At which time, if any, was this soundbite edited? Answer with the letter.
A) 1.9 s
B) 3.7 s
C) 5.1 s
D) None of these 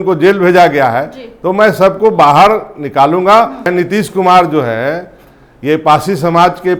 B